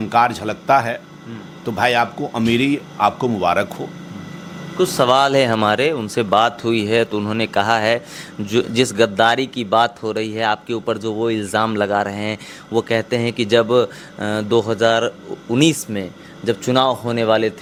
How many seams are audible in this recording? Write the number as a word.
zero